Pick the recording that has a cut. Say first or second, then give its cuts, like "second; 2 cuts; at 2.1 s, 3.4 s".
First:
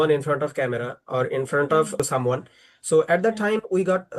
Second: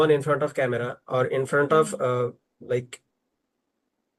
first; 1 cut; at 2.0 s